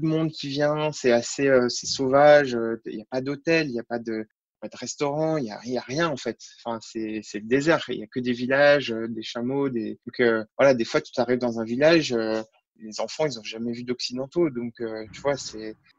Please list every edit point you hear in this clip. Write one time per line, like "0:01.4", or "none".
none